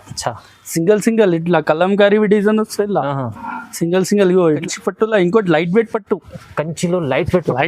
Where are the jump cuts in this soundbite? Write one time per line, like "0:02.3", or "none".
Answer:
0:04.6